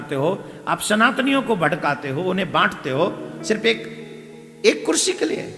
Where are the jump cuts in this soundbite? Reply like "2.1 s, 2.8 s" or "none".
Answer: none

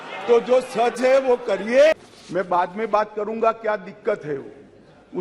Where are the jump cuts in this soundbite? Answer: 2.0 s

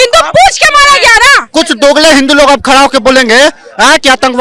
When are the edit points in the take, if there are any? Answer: 1.5 s

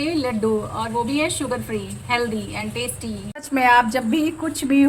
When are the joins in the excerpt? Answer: 3.4 s

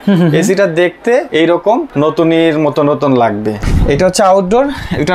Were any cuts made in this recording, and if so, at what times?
1.6 s, 3.6 s

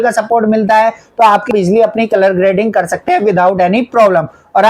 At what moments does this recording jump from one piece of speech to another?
1.5 s

